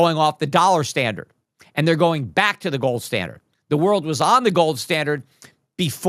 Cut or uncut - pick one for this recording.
uncut